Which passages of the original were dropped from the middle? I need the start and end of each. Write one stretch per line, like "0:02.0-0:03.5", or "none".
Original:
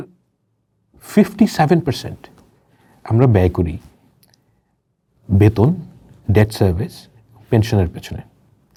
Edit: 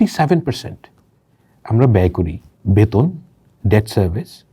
0:03.9-0:05.1